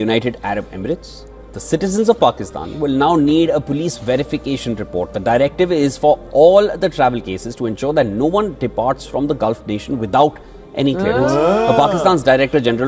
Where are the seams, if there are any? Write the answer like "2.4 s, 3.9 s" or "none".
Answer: none